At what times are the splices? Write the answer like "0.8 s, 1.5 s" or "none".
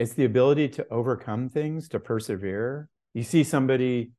2.9 s